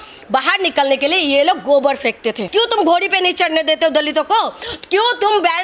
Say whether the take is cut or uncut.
cut